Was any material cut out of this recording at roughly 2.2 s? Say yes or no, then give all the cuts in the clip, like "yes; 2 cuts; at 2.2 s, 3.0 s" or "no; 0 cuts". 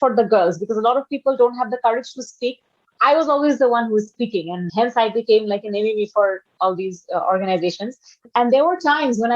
no; 2 cuts; at 4.7 s, 8.3 s